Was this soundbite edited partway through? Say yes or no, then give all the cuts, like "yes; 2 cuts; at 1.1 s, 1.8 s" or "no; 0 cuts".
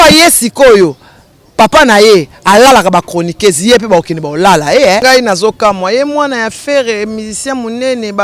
yes; 1 cut; at 5.0 s